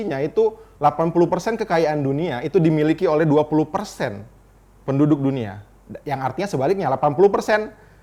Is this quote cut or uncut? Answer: uncut